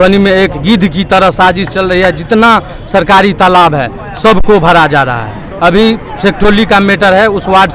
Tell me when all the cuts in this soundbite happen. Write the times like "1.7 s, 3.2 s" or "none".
none